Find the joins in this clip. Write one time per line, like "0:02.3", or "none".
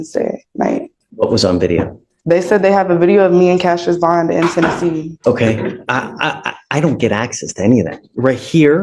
0:01.0
0:05.1